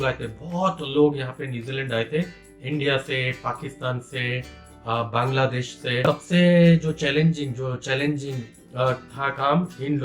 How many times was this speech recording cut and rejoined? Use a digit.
1